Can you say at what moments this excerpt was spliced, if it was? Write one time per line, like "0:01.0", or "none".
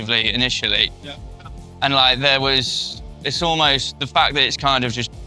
none